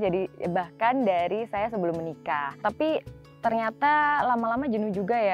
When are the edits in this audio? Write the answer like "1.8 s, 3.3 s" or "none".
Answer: 2.5 s, 3.2 s